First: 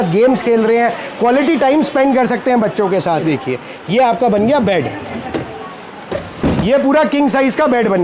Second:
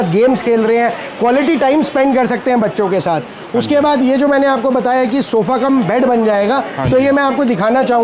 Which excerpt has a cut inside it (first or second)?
first